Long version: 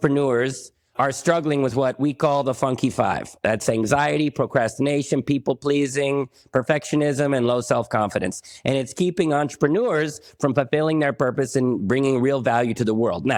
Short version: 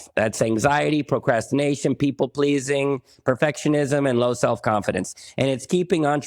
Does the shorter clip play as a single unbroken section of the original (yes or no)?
yes